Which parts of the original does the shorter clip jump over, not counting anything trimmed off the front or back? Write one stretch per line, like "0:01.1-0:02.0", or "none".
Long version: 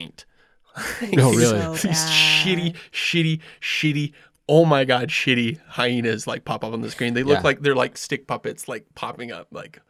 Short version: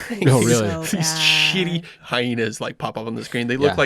0:02.9-0:05.6